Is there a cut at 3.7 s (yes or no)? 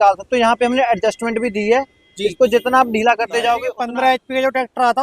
yes